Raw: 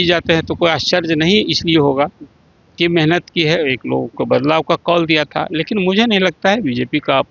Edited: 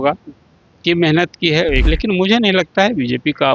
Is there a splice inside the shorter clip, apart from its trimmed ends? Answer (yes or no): yes